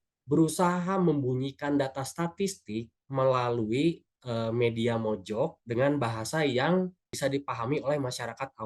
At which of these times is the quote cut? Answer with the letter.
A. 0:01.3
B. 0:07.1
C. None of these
B